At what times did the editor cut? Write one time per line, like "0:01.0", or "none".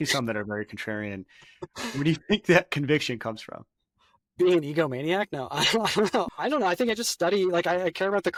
none